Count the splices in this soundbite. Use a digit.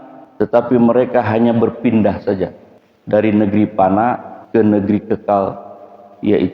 1